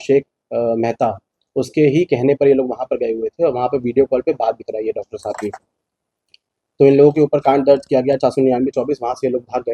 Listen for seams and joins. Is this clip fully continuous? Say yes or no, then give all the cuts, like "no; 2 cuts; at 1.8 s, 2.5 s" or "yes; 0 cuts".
yes; 0 cuts